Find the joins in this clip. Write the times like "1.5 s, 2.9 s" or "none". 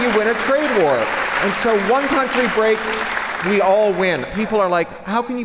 4.2 s